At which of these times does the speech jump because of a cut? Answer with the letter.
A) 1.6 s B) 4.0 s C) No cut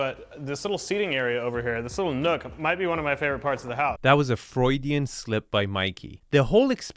B